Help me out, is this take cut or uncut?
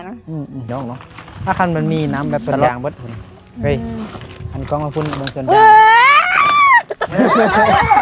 cut